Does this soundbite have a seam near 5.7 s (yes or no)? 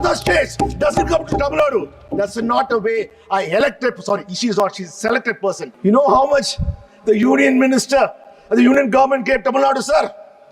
yes